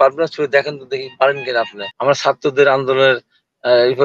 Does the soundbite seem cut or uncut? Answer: cut